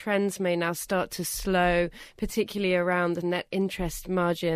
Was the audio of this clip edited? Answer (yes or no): yes